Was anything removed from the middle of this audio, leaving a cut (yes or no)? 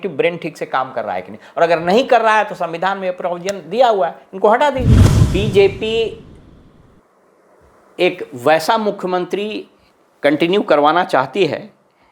yes